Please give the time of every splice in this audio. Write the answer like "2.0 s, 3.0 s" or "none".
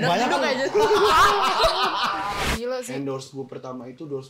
2.4 s